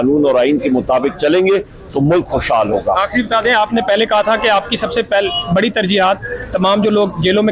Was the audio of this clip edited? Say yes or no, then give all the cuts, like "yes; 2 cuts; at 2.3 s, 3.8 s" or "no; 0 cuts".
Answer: no; 0 cuts